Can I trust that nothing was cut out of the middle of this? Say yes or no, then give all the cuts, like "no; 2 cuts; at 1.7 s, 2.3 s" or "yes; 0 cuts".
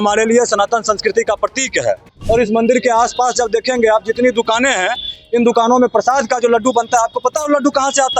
no; 1 cut; at 2.1 s